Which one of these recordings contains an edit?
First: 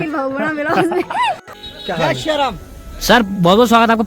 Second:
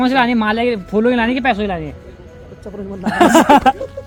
first; 1 cut; at 1.6 s

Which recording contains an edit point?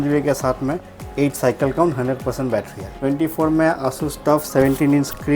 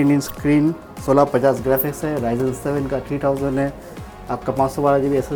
first; 2 cuts; at 1.0 s, 2.9 s

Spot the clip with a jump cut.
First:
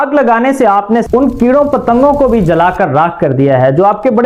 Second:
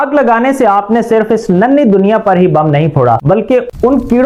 first; 1 cut; at 1.0 s

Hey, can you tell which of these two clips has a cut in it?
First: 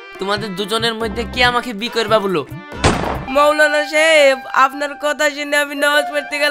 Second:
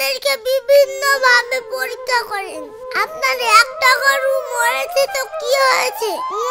first; 1 cut; at 3.2 s

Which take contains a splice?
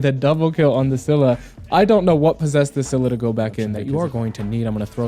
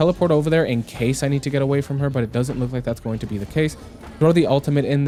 first; 1 cut; at 3.8 s

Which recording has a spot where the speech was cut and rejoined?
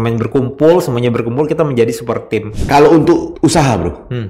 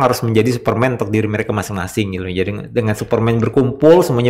first; 2 cuts; at 2.5 s, 3.3 s

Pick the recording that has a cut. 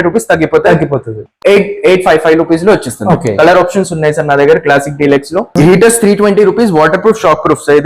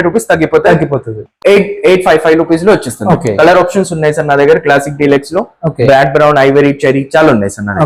first; 1 cut; at 5.5 s

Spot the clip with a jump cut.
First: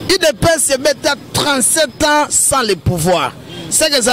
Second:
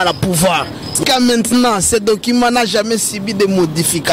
second; 1 cut; at 1.0 s

